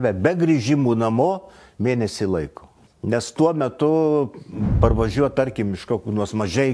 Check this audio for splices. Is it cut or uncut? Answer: uncut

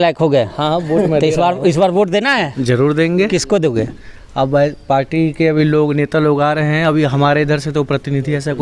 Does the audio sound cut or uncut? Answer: uncut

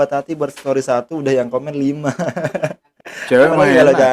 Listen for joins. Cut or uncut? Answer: cut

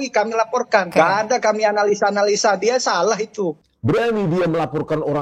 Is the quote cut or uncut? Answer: cut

